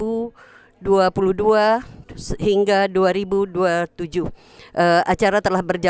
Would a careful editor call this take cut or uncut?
uncut